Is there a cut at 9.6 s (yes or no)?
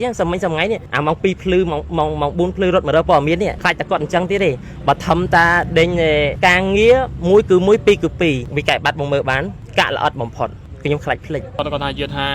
yes